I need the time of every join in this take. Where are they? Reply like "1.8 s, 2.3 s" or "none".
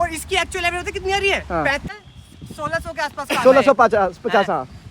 1.9 s